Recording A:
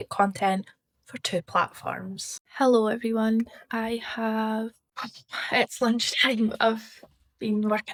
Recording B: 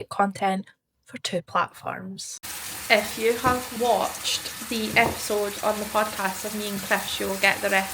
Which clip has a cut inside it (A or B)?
B